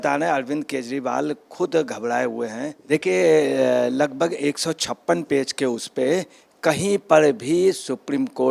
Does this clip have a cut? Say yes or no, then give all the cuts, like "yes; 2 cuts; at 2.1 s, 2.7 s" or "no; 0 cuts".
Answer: yes; 1 cut; at 2.7 s